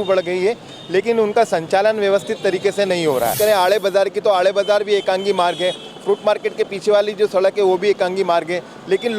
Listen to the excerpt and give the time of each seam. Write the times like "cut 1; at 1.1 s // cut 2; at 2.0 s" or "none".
cut 1; at 3.3 s